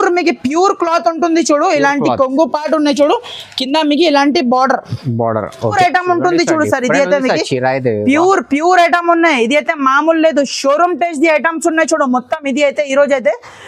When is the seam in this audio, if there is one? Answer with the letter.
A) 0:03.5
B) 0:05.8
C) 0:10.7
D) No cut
B